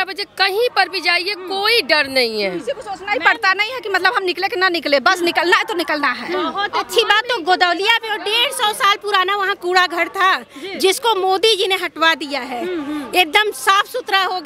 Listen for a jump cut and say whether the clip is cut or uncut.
uncut